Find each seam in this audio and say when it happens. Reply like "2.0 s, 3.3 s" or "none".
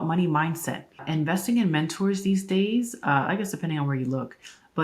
1.0 s